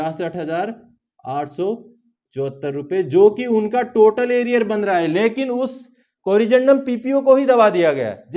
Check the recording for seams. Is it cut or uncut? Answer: uncut